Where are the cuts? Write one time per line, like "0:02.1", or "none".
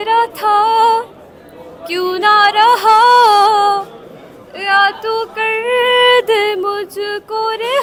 none